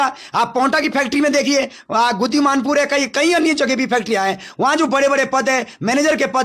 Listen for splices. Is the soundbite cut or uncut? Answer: uncut